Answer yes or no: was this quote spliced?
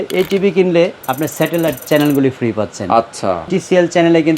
yes